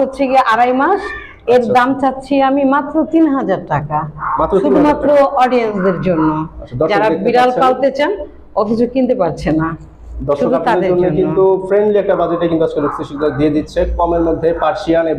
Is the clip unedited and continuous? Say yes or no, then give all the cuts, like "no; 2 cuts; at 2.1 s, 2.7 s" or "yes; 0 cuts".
yes; 0 cuts